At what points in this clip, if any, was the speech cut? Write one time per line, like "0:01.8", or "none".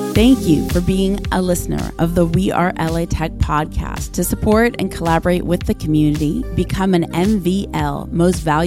none